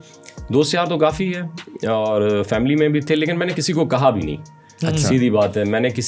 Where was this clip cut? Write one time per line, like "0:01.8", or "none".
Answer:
none